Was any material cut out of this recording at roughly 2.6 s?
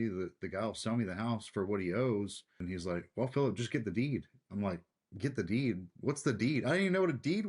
yes; 1 cut; at 2.6 s

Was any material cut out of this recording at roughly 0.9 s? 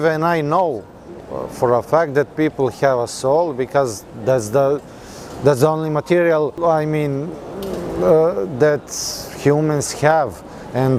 no; 0 cuts

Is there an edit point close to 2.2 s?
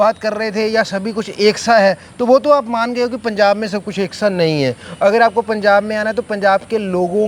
no; 0 cuts

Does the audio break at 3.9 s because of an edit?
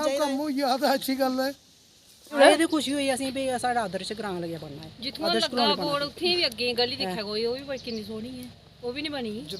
no; 1 cut; at 2.2 s

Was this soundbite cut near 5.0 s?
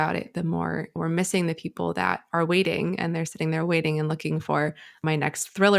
yes; 2 cuts; at 0.9 s, 5.0 s

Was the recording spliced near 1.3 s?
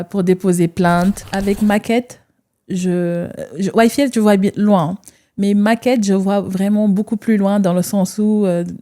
yes; 1 cut; at 1.3 s

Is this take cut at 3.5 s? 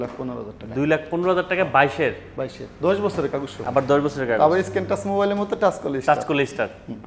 no; 0 cuts

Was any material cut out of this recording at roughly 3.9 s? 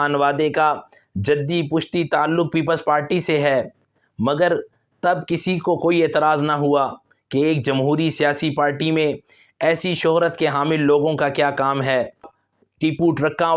no; 1 cut; at 12.4 s

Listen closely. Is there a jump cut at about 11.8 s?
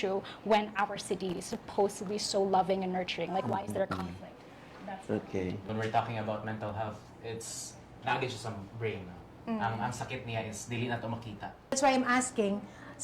yes; 2 cuts; at 5.6 s, 11.8 s

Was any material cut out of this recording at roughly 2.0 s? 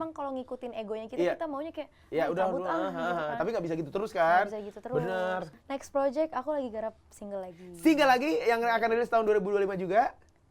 no; 1 cut; at 5.6 s

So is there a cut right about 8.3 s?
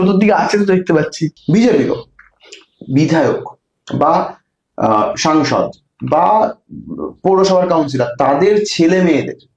no; 1 cut; at 1.3 s

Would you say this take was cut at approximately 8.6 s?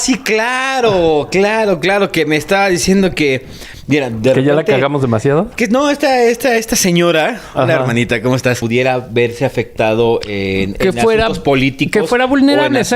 yes; 1 cut; at 8.6 s

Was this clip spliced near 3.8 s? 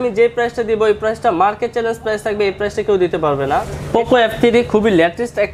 yes; 1 cut; at 3.8 s

